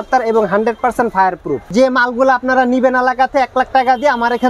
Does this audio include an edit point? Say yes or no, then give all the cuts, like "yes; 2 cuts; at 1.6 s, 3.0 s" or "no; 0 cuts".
yes; 1 cut; at 1.7 s